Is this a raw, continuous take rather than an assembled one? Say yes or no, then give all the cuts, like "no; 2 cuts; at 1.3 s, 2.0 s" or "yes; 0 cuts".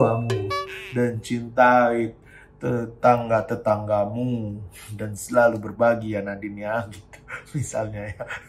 yes; 0 cuts